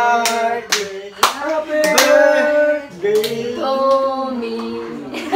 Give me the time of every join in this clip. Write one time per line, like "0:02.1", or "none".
none